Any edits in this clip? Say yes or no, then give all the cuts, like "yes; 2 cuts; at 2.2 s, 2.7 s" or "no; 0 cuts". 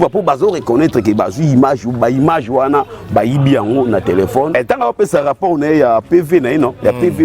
yes; 1 cut; at 4.5 s